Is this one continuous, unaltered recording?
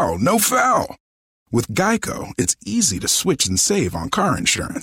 yes; 0 cuts

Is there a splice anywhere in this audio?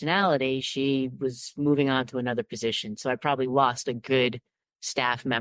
no; 0 cuts

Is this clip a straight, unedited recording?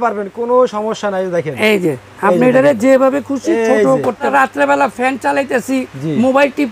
no; 1 cut; at 4.3 s

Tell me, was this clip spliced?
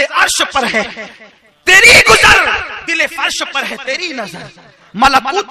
no; 0 cuts

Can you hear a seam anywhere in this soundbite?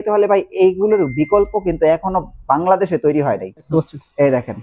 yes; 1 cut; at 3.7 s

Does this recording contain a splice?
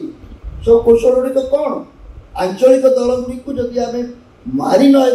no; 0 cuts

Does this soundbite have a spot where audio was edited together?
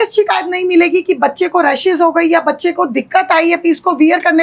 no; 0 cuts

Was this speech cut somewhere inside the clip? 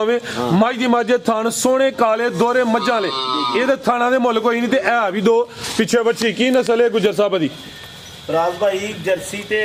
no; 0 cuts

